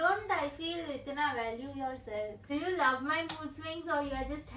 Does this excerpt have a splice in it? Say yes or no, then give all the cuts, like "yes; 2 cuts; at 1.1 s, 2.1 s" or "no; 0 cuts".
yes; 1 cut; at 2.4 s